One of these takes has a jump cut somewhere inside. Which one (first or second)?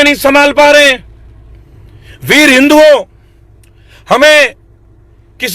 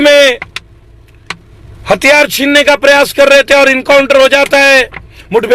first